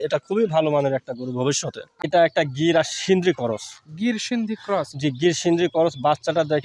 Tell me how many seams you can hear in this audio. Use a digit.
1